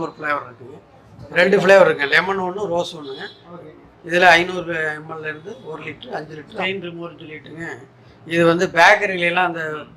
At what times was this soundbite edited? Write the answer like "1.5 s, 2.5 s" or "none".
1.1 s, 6.5 s